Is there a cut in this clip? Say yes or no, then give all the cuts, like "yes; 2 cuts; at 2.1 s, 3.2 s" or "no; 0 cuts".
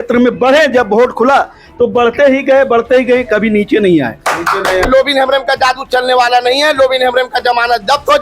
yes; 1 cut; at 4.9 s